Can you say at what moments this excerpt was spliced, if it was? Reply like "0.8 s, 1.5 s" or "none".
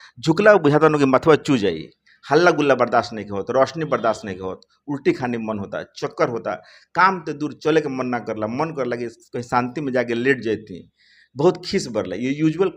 none